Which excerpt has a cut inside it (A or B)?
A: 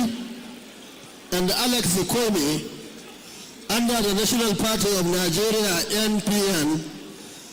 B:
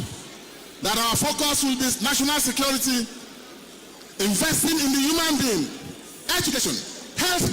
B